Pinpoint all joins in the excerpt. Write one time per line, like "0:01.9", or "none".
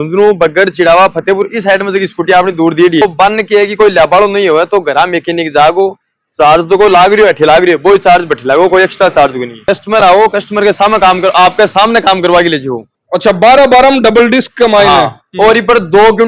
0:03.0
0:09.6
0:12.9